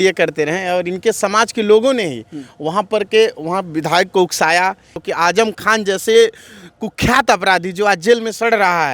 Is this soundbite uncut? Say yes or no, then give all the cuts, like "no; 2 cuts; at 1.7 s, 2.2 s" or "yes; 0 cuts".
no; 1 cut; at 4.9 s